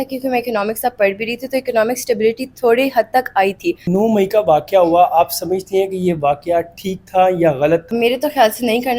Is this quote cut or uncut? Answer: cut